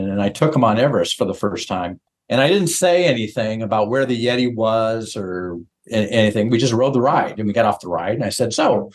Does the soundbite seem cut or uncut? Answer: uncut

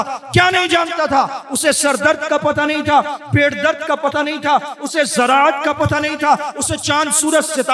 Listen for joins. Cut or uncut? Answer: uncut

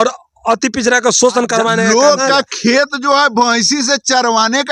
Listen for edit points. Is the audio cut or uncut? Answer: cut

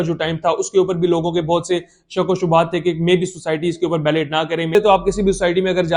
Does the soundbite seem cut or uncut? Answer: cut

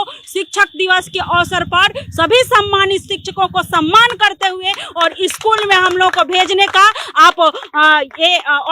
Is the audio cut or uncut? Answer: uncut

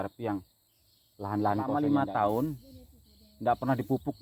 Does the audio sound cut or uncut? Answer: cut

